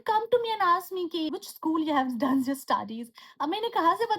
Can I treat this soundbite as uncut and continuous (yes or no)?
no